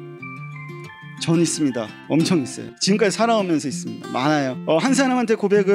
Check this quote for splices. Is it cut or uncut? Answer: cut